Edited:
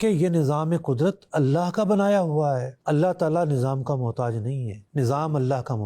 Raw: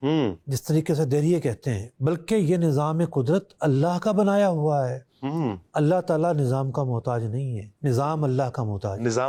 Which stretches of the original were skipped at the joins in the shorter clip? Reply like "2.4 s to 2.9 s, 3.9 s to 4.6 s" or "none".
5.0 s to 5.6 s